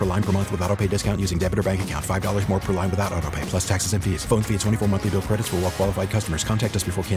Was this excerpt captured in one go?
yes; 0 cuts

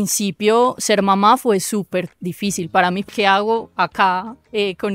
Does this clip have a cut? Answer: yes; 1 cut; at 3.0 s

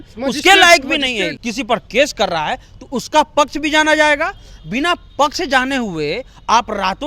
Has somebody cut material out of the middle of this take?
yes; 1 cut; at 1.3 s

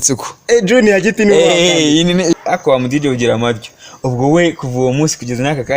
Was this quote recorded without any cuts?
no; 1 cut; at 2.3 s

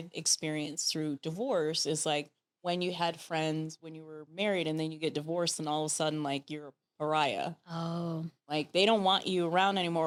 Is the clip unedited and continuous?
yes; 0 cuts

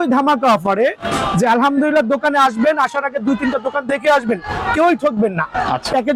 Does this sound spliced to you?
no; 0 cuts

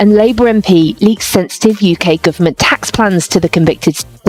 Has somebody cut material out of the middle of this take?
no; 0 cuts

